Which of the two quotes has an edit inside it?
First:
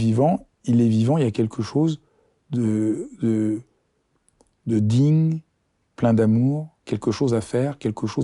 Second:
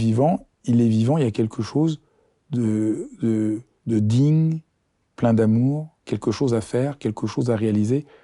second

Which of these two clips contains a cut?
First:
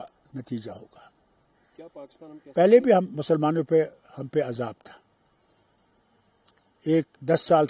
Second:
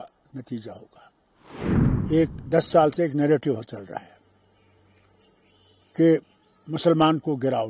second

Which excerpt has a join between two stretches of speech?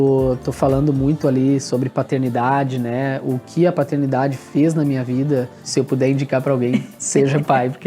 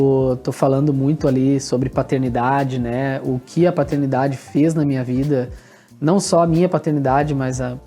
first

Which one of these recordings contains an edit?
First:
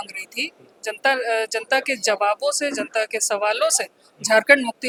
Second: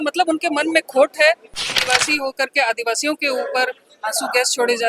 second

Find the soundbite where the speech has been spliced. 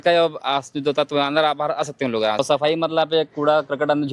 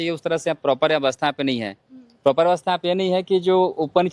first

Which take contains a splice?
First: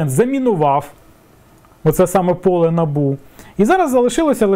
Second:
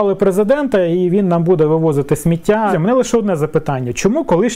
second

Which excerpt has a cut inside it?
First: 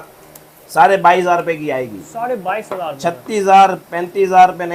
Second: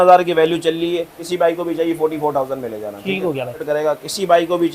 second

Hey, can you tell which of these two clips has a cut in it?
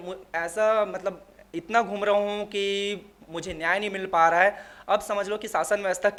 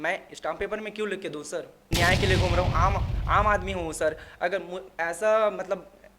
second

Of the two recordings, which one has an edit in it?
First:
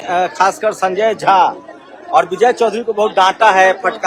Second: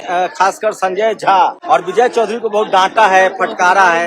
second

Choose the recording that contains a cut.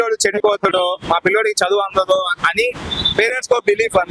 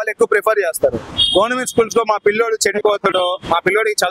second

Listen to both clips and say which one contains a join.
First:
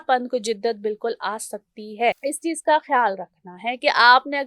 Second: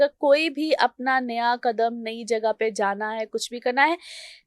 first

